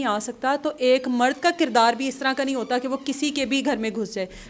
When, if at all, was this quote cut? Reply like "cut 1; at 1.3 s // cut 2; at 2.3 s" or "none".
none